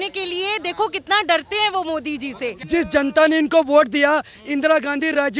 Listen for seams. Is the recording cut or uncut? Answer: cut